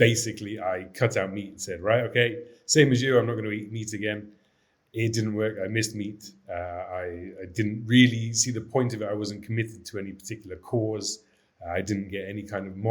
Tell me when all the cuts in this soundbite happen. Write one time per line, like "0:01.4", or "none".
none